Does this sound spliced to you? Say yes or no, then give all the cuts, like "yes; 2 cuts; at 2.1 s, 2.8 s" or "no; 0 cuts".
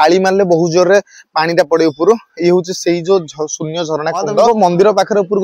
yes; 1 cut; at 4.5 s